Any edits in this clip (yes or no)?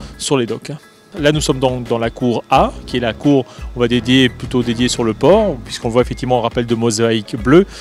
yes